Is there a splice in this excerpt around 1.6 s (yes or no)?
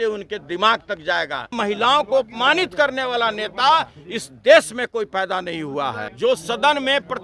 yes